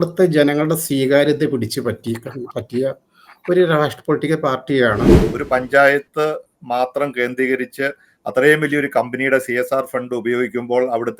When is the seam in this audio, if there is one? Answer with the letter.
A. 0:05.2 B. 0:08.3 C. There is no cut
A